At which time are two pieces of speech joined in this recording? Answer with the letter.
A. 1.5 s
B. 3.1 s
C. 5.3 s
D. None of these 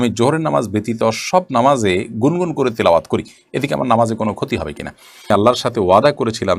C